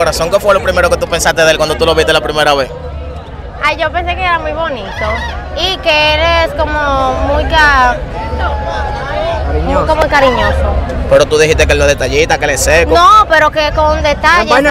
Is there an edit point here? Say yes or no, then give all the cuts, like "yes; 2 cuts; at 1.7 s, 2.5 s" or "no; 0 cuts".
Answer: no; 0 cuts